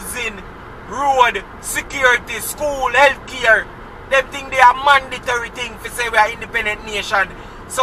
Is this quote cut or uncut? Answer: uncut